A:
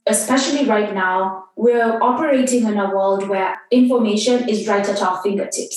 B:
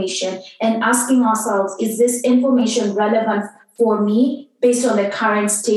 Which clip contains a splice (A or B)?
A